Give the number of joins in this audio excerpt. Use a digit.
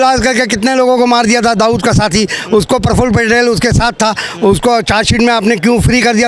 0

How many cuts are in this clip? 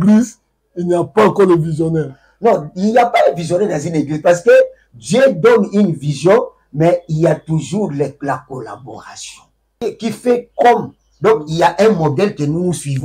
1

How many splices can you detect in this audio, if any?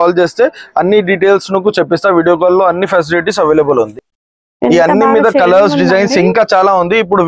1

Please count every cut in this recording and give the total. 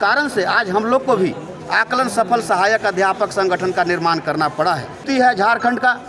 1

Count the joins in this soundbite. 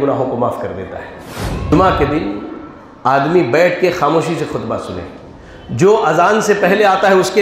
1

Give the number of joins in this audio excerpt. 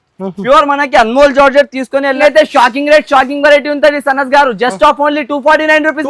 1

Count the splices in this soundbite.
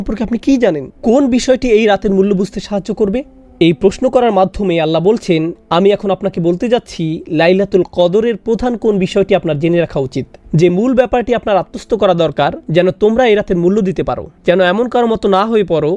0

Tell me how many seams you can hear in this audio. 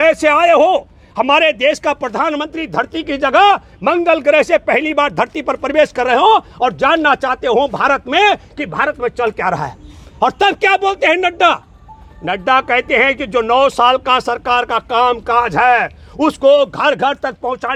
0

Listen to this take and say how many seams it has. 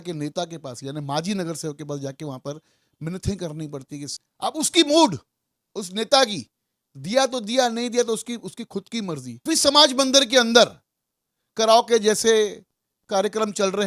2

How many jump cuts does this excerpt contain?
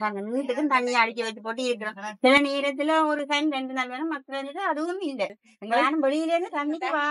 1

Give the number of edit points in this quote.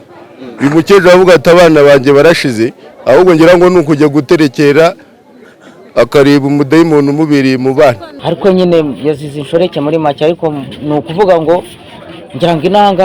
1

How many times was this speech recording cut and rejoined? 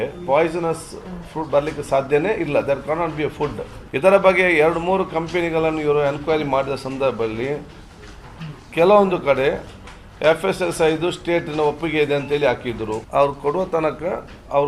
2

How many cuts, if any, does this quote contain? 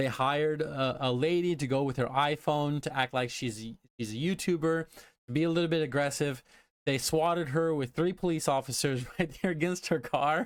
0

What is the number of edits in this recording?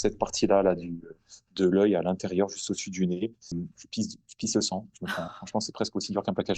1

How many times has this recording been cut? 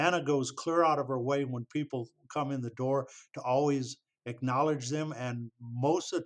0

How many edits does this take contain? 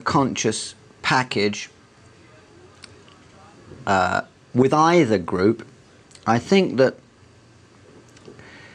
1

